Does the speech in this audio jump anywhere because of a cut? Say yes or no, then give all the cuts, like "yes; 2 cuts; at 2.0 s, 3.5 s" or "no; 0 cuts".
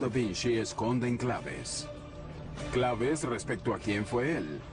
yes; 1 cut; at 1.6 s